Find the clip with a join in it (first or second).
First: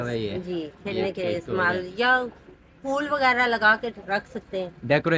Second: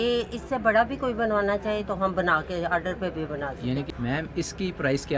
second